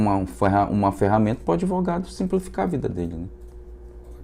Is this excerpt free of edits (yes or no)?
yes